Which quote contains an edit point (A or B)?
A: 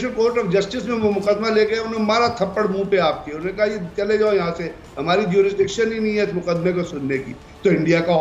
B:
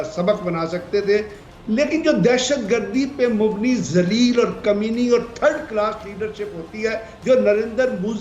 B